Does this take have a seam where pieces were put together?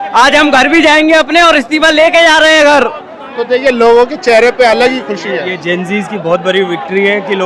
no; 0 cuts

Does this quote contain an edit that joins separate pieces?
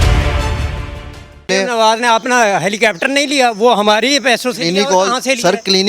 yes; 1 cut; at 1.5 s

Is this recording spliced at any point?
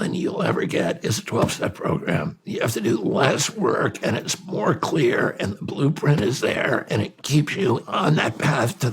yes; 2 cuts; at 2.4 s, 7.8 s

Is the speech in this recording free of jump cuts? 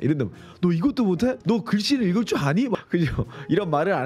no; 1 cut; at 1.4 s

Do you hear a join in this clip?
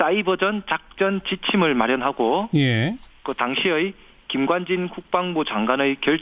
no; 0 cuts

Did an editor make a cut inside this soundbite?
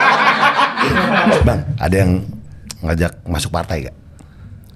yes; 1 cut; at 1.4 s

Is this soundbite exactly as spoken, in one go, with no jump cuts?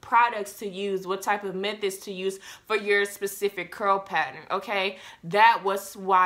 yes; 0 cuts

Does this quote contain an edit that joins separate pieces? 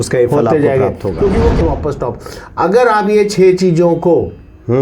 yes; 1 cut; at 1.6 s

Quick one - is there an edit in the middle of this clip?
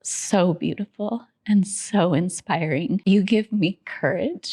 yes; 1 cut; at 3.0 s

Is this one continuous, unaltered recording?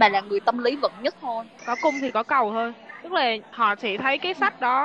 no; 2 cuts; at 1.6 s, 3.5 s

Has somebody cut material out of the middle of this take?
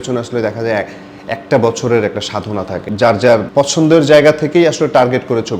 yes; 1 cut; at 2.8 s

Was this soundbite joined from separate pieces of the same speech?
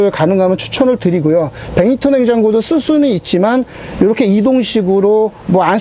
no; 0 cuts

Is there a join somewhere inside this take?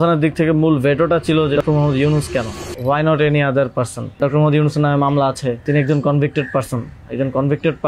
yes; 4 cuts; at 1.6 s, 2.6 s, 4.2 s, 5.6 s

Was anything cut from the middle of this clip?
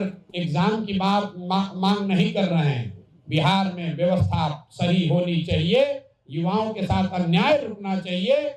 no; 0 cuts

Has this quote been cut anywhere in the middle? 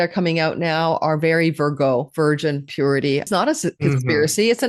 yes; 1 cut; at 3.3 s

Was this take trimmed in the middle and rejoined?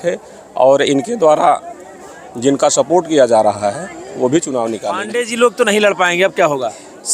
yes; 1 cut; at 4.9 s

